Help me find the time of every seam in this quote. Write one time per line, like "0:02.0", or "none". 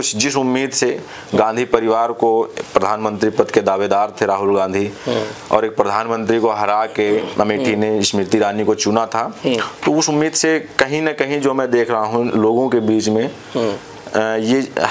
none